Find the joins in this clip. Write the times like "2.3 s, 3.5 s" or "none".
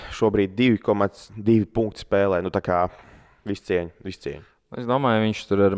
none